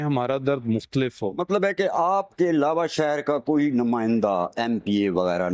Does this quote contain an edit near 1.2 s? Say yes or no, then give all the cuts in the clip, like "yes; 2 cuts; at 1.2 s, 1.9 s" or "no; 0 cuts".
no; 0 cuts